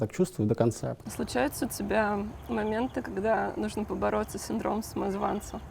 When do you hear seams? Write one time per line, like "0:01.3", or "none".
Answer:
0:00.9

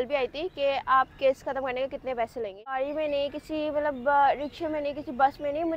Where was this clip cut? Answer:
0:02.9

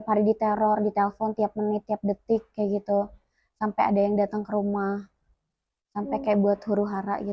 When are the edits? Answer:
none

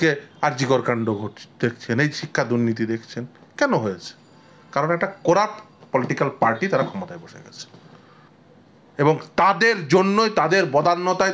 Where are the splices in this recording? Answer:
0:08.3

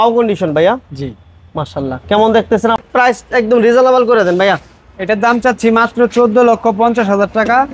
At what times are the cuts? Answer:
0:02.8

